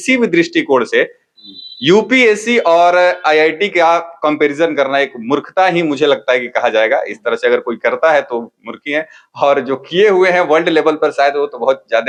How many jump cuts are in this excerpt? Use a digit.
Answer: 0